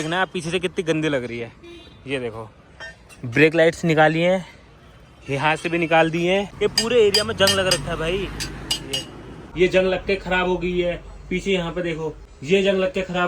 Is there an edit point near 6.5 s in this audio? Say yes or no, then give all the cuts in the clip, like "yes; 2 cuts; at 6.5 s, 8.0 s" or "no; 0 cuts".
yes; 3 cuts; at 6.5 s, 9.4 s, 12.3 s